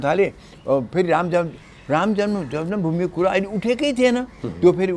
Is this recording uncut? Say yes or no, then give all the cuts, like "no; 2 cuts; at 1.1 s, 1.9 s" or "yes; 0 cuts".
yes; 0 cuts